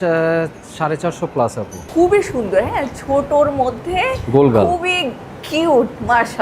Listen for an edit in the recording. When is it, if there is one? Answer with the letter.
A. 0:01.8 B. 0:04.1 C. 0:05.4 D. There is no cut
A